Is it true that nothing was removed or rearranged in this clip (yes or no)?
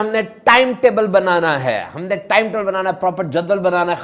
yes